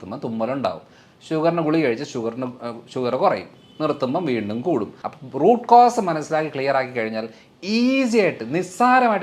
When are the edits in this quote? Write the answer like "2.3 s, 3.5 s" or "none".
5.0 s